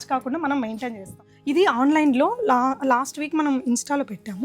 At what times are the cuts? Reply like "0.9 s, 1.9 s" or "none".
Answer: 1.3 s